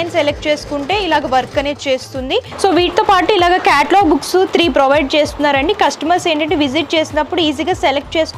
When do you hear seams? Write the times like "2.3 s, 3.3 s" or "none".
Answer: 2.5 s